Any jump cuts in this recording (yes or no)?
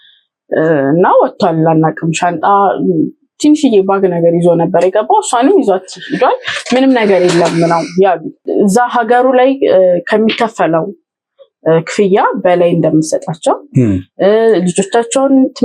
yes